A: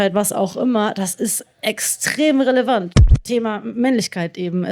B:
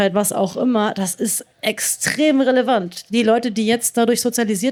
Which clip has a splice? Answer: A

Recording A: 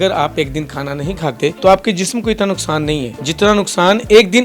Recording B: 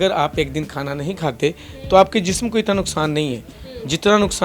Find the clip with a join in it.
A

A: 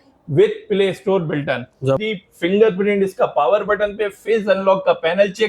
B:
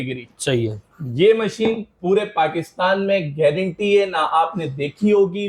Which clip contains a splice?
A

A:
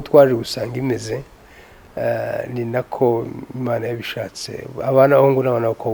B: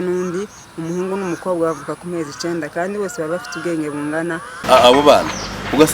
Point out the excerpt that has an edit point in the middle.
B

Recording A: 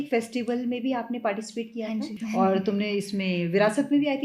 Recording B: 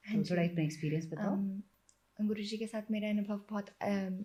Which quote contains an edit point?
A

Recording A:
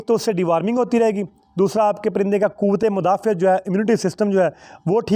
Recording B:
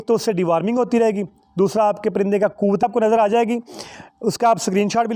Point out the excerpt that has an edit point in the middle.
B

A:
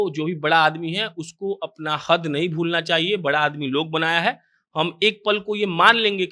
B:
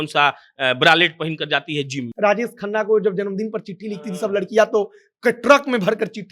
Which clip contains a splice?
B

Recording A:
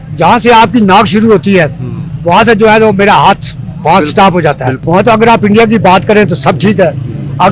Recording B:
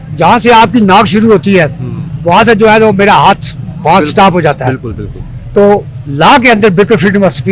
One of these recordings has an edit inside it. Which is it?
A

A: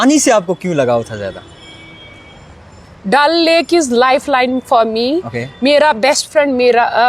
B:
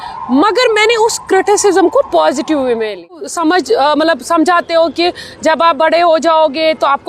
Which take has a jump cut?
B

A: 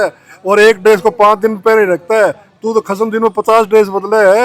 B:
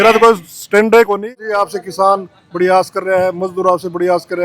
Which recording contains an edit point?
B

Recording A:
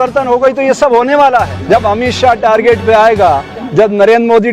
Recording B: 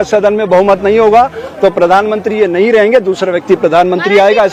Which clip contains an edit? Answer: A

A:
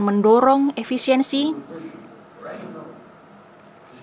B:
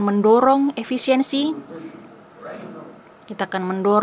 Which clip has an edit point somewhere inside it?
B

